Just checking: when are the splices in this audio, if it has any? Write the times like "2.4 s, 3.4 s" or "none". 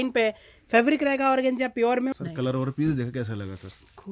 2.1 s